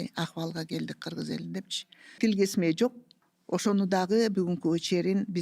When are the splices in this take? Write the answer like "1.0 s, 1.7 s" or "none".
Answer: 2.0 s

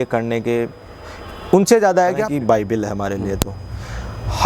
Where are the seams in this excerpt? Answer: 2.3 s

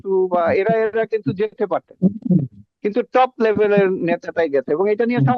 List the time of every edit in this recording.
none

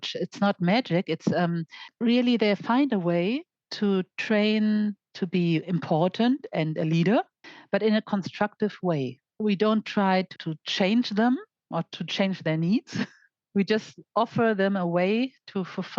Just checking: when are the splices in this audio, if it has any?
1.8 s

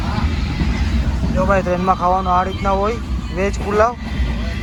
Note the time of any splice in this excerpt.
none

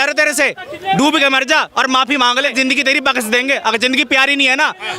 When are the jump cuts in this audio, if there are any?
2.1 s

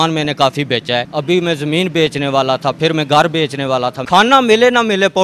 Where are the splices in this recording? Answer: 1.1 s, 4.0 s

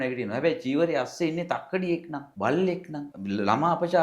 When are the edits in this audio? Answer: 2.2 s, 3.1 s

